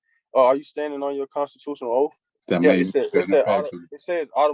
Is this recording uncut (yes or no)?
no